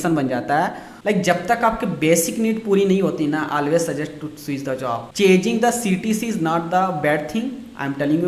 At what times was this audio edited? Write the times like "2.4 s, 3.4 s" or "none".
0.9 s